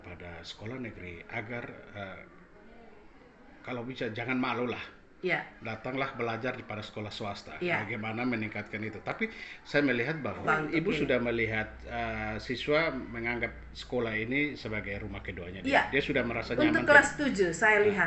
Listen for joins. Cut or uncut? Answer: cut